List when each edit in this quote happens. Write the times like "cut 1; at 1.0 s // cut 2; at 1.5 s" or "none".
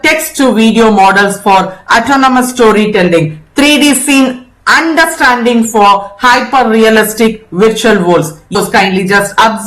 cut 1; at 8.6 s